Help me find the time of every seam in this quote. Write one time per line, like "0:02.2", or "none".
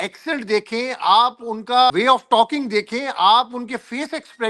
0:01.9